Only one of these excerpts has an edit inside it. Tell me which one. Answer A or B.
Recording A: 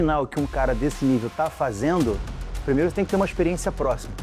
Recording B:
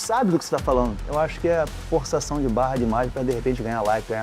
B